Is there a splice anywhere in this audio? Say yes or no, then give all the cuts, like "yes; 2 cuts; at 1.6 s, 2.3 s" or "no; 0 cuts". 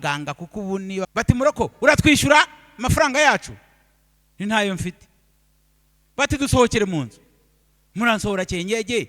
yes; 1 cut; at 1.1 s